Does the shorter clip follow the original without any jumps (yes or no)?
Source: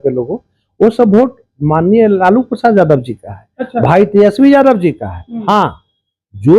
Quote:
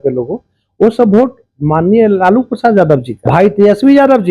no